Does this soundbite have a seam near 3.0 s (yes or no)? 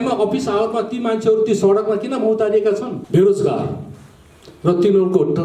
yes